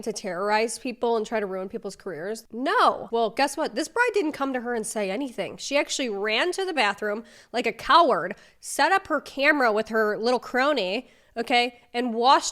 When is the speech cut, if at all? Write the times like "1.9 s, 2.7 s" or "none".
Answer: 2.4 s, 3.0 s